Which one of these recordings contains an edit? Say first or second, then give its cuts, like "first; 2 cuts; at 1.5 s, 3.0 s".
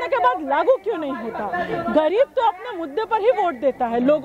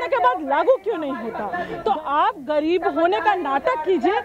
second; 1 cut; at 1.6 s